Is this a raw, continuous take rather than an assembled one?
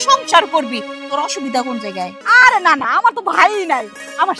no; 1 cut; at 2.2 s

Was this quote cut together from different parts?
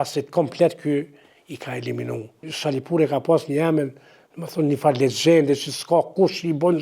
yes; 1 cut; at 2.5 s

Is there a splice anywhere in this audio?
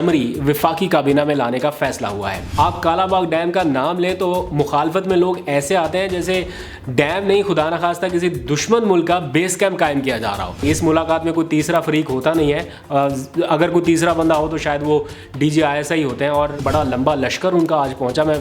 yes; 3 cuts; at 2.5 s, 10.6 s, 16.6 s

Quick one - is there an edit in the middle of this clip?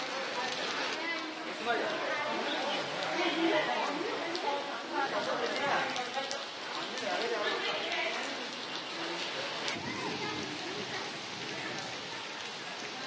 yes; 1 cut; at 0.9 s

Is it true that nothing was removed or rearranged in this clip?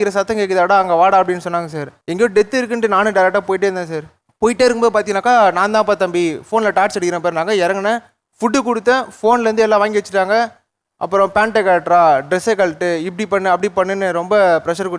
yes; 0 cuts

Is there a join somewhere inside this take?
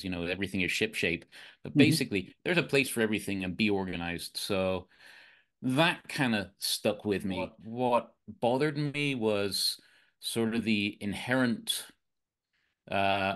yes; 1 cut; at 7.6 s

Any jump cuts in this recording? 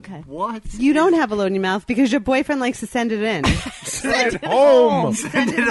no; 0 cuts

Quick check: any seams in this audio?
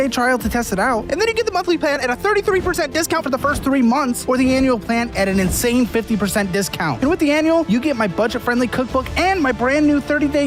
no; 0 cuts

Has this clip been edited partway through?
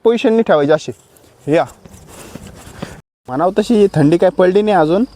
yes; 1 cut; at 3.0 s

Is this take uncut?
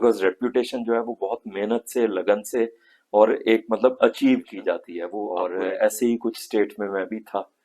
no; 1 cut; at 4.9 s

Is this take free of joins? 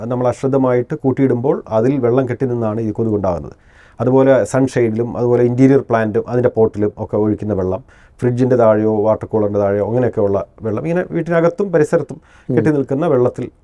yes; 0 cuts

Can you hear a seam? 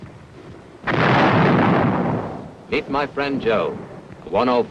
no; 0 cuts

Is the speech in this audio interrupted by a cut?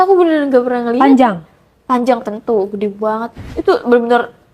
yes; 1 cut; at 3.5 s

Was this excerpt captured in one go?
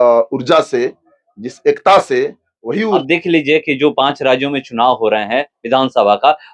no; 1 cut; at 3.0 s

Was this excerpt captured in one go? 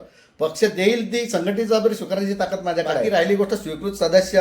no; 1 cut; at 3.1 s

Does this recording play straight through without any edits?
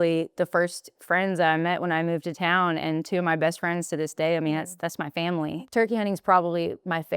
no; 1 cut; at 5.6 s

